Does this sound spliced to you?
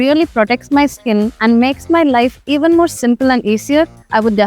no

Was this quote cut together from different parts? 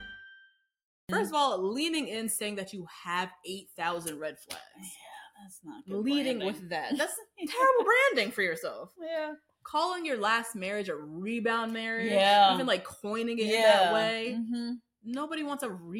yes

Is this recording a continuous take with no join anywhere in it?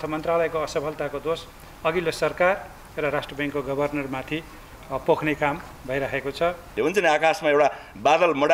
no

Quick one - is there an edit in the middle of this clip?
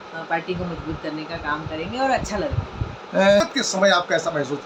no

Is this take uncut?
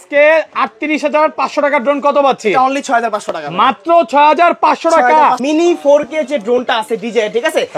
no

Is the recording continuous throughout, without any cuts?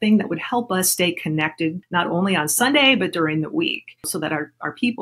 no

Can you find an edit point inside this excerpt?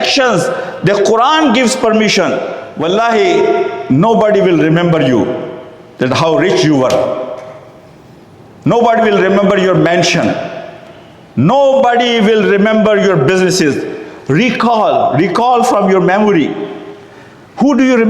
yes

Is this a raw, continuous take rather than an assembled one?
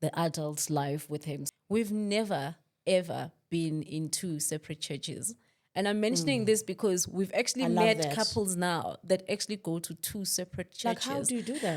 no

